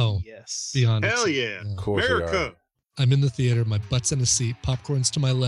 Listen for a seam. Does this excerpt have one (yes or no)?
yes